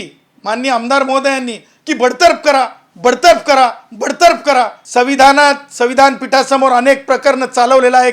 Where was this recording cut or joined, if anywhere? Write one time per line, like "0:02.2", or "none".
0:04.8